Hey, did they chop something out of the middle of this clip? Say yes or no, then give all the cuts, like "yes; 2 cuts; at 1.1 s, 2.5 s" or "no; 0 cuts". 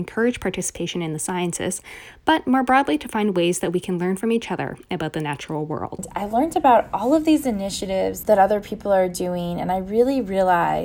yes; 2 cuts; at 6.1 s, 8.2 s